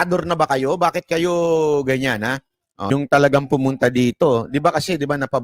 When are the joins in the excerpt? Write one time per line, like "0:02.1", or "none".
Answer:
0:02.9